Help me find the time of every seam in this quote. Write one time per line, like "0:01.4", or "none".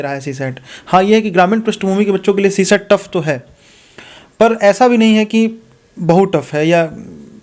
none